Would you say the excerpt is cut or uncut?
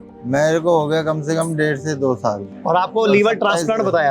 cut